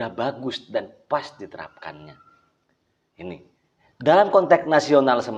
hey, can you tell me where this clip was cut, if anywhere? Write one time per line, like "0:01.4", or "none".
none